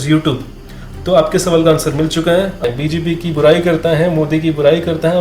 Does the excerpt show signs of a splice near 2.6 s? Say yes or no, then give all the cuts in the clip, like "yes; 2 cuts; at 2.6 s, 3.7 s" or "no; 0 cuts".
yes; 1 cut; at 2.6 s